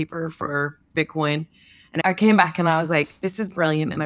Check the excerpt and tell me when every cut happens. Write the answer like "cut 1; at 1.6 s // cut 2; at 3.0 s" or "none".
cut 1; at 0.9 s // cut 2; at 2.0 s